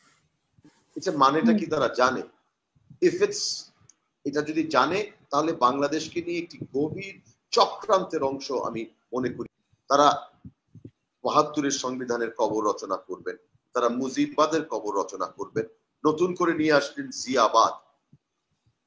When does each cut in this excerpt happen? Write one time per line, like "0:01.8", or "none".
0:09.5

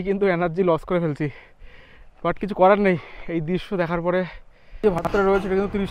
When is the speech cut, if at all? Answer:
0:04.8

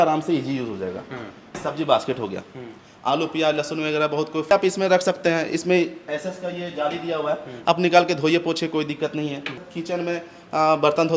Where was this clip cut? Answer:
none

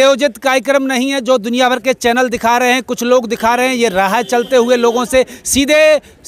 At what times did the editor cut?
none

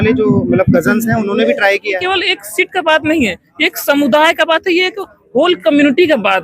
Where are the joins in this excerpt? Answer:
0:02.0

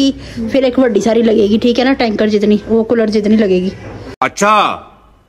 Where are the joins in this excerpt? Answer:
none

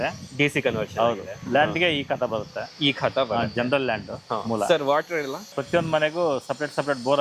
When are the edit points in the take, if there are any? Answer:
0:05.6

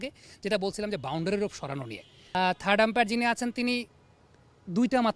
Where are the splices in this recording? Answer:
0:02.2

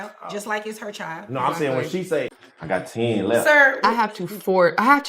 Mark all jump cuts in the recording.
0:02.4

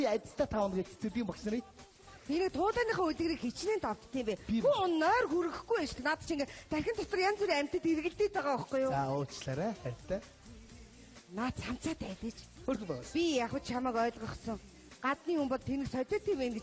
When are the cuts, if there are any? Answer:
0:01.4

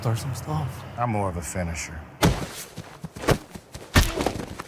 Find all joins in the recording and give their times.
none

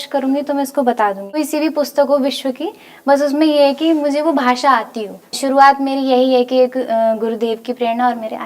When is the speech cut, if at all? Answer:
0:01.4
0:05.4

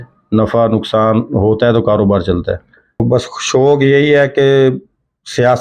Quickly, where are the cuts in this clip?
0:03.0

